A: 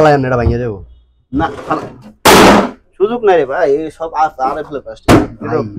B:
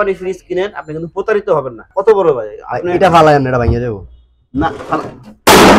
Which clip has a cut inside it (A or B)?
B